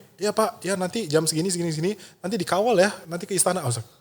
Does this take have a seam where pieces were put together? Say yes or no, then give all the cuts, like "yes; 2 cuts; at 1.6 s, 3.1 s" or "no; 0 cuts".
yes; 1 cut; at 3.1 s